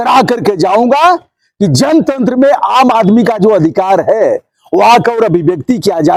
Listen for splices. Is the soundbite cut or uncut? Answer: uncut